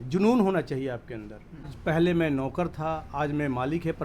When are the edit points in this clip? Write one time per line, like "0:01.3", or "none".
0:01.7